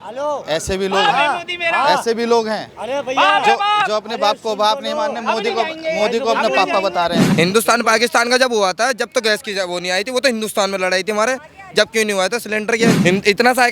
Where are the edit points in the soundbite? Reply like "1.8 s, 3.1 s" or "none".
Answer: 7.2 s, 13.0 s